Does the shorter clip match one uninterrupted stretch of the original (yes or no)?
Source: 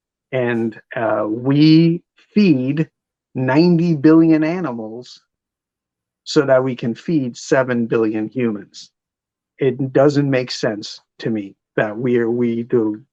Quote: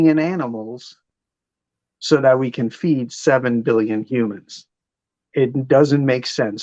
yes